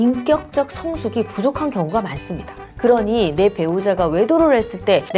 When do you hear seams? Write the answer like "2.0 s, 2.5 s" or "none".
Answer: 2.7 s